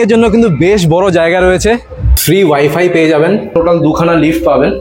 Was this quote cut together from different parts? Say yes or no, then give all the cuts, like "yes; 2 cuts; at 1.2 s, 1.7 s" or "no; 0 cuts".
yes; 1 cut; at 3.5 s